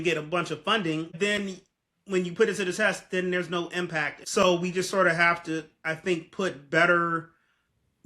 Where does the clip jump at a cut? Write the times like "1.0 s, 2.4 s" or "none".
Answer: 1.1 s, 4.2 s